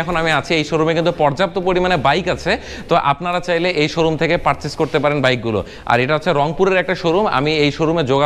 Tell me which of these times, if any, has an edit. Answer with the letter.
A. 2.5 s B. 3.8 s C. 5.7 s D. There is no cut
D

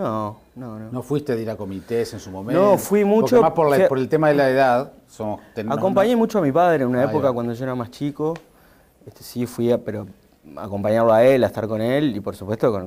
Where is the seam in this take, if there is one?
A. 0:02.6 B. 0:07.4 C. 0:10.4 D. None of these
B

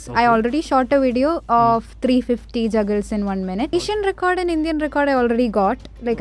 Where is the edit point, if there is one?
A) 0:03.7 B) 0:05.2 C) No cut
A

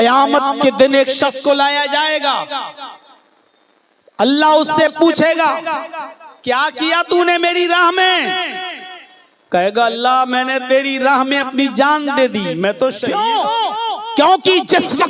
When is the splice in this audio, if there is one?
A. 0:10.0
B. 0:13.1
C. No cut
B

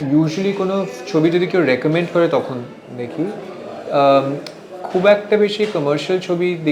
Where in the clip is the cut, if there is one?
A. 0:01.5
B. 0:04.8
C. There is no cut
C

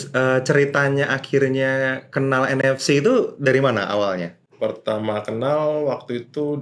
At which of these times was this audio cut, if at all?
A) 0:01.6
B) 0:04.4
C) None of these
B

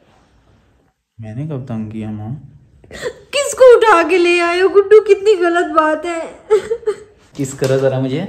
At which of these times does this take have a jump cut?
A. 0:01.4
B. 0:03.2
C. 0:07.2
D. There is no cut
C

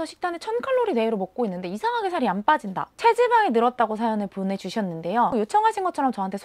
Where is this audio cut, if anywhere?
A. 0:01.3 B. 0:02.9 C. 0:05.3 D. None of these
C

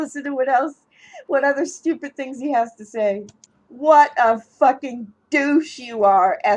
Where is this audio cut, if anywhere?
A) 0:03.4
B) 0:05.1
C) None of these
A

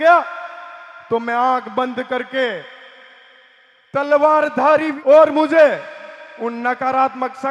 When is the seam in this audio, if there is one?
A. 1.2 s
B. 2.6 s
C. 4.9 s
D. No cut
C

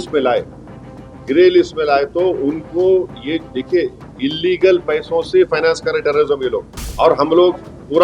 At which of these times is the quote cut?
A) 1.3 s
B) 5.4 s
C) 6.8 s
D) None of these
C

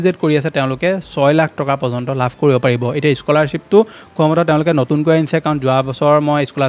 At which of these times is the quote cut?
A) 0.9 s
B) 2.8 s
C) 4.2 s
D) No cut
D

